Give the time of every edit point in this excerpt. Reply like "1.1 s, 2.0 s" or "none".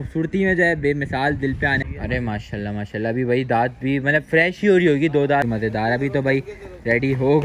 1.8 s, 5.4 s